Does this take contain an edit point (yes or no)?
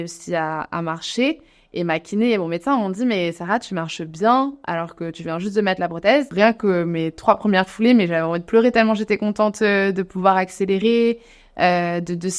yes